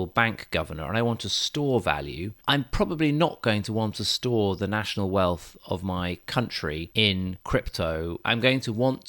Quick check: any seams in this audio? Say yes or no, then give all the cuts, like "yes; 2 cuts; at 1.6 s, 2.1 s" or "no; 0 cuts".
yes; 2 cuts; at 2.4 s, 8.2 s